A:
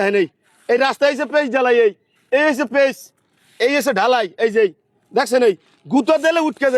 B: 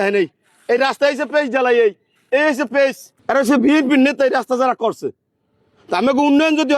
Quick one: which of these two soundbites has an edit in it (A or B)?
B